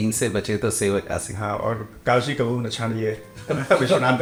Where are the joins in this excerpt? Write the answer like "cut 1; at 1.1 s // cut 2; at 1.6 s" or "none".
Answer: none